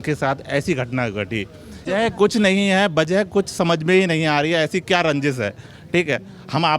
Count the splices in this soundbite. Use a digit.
1